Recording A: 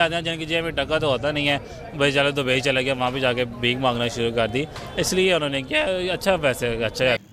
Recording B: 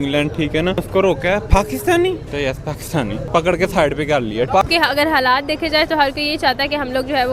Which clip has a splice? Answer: B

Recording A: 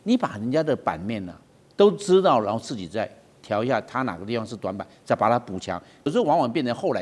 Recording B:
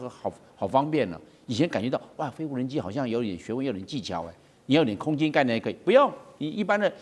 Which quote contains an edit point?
A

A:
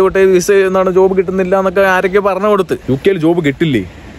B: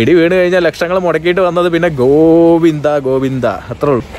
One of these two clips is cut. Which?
A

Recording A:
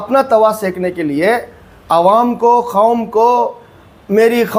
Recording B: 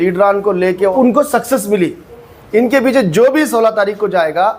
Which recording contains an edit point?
B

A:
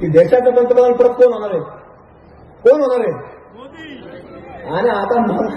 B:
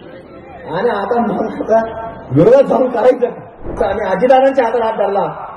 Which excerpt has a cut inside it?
B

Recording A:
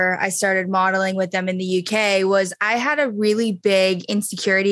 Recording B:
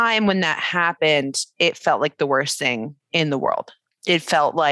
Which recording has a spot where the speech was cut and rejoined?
B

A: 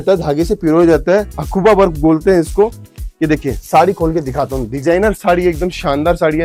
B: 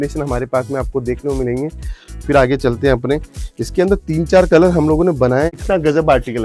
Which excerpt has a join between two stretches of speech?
B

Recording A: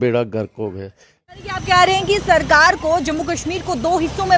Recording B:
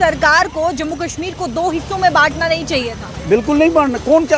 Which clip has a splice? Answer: A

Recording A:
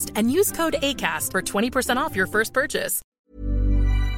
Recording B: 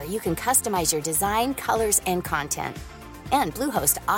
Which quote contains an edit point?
A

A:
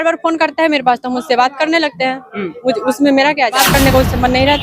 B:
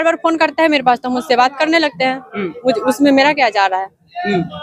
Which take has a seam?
A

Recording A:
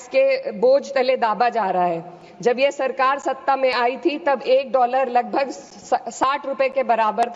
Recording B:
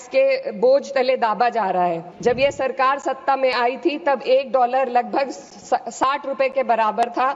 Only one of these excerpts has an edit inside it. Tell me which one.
B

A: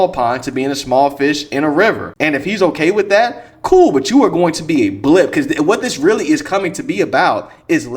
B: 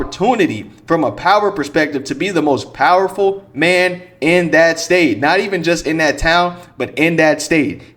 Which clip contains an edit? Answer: A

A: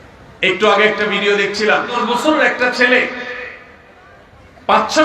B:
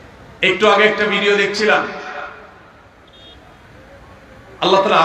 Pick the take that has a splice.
A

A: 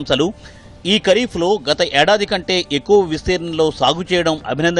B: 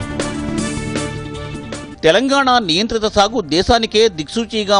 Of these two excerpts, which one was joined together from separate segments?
B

